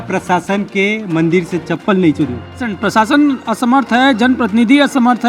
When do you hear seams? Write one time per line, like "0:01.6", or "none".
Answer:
0:02.8